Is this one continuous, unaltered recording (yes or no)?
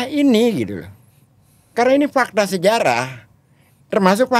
yes